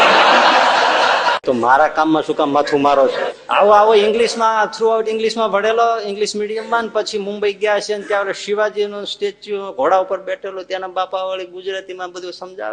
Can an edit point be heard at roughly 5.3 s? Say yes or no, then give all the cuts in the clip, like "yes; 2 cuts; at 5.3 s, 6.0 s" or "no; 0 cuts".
no; 2 cuts; at 1.4 s, 3.3 s